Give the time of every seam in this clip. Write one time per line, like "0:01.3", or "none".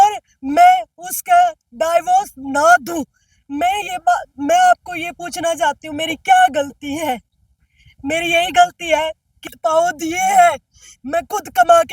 0:09.5

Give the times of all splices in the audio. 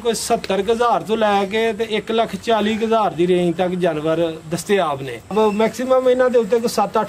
0:05.3

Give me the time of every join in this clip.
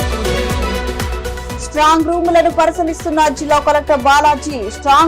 0:01.3

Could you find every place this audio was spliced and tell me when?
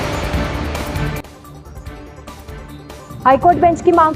none

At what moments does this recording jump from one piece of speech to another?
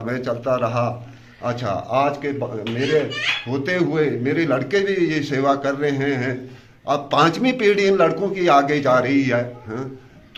none

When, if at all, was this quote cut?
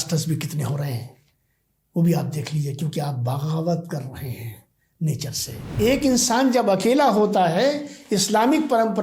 0:05.7

